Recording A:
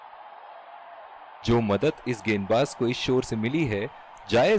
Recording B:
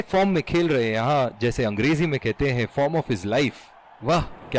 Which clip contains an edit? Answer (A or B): A